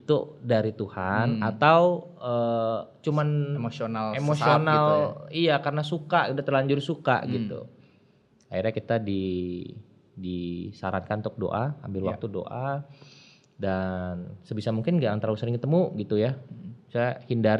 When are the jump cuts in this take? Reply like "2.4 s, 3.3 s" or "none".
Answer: none